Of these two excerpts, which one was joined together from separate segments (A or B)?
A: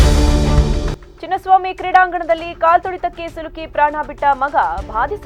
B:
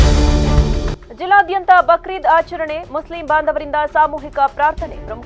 B